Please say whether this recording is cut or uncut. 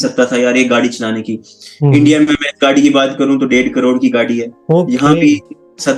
uncut